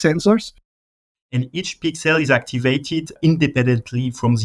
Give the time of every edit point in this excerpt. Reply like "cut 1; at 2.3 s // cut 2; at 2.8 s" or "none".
cut 1; at 1.0 s // cut 2; at 3.2 s